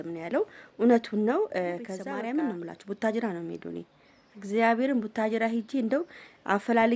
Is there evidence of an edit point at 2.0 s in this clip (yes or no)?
yes